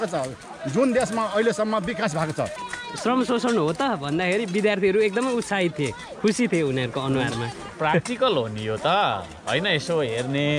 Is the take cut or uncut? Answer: cut